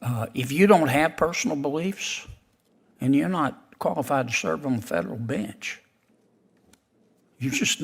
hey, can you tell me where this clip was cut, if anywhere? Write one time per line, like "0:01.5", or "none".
none